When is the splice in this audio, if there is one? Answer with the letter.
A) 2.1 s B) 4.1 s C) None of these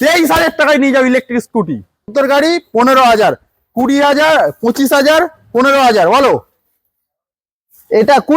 A